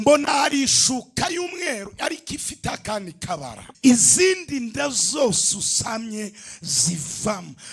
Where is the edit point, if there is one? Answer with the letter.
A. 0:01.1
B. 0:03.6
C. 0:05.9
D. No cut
B